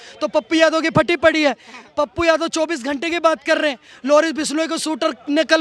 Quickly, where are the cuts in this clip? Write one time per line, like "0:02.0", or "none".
none